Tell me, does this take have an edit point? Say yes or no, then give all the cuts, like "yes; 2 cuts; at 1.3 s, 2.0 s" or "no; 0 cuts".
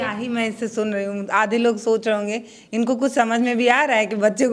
no; 0 cuts